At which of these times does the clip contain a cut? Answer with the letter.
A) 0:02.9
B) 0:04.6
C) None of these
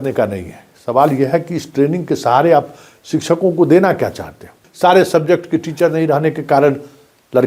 B